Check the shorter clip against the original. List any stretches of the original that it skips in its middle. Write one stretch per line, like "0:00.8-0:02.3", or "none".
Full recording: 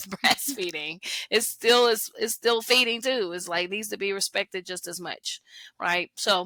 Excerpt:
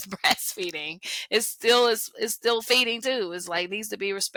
none